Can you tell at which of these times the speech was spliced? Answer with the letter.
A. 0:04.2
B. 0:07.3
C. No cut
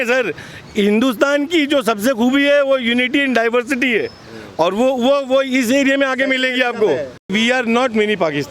B